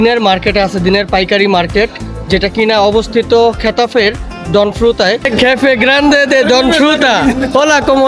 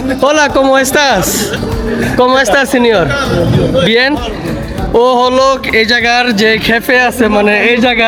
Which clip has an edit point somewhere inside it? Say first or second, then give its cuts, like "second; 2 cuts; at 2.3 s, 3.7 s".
first; 1 cut; at 5.2 s